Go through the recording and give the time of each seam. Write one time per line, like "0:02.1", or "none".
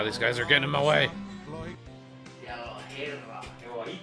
0:01.8